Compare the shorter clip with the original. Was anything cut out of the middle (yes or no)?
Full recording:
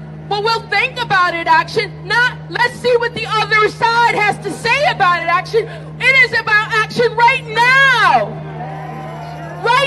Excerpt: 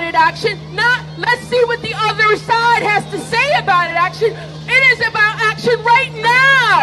no